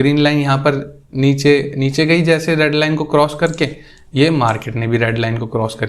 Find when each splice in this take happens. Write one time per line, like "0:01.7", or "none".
none

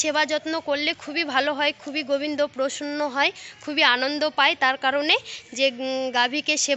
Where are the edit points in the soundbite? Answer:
none

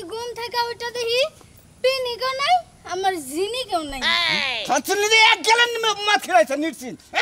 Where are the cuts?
none

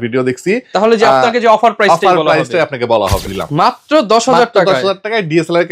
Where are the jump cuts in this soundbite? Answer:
0:03.4

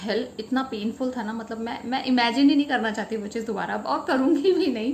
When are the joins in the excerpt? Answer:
none

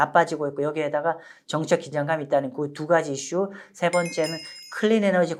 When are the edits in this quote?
none

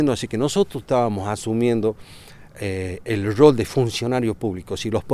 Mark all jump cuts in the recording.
none

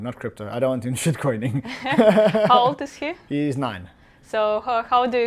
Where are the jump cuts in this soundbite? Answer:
none

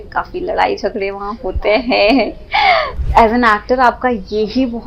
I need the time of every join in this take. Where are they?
0:03.0

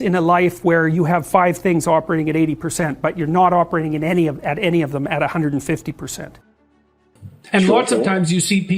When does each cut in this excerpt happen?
0:07.1

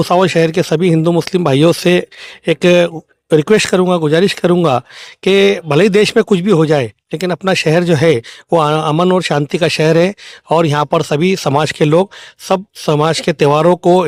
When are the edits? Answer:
none

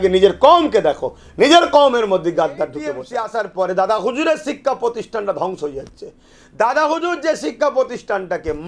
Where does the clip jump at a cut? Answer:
0:03.1

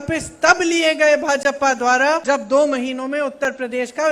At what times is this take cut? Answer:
0:02.2

